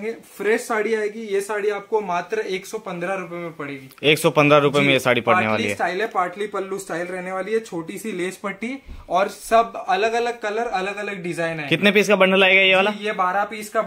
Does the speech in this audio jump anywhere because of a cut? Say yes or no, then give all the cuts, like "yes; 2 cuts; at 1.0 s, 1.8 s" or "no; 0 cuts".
no; 0 cuts